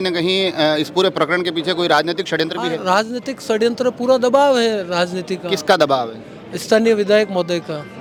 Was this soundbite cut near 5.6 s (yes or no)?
no